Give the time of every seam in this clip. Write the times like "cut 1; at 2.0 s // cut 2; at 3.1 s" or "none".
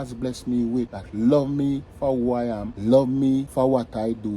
cut 1; at 1.0 s // cut 2; at 2.7 s // cut 3; at 3.5 s